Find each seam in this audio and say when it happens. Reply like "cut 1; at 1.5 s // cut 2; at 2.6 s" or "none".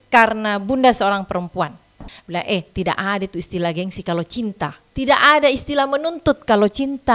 cut 1; at 2.1 s // cut 2; at 4.8 s